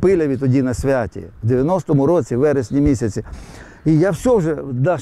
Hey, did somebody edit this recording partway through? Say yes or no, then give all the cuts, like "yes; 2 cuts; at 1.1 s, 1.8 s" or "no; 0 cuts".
no; 0 cuts